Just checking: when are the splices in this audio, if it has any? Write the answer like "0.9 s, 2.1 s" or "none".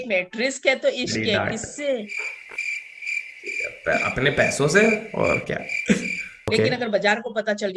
6.5 s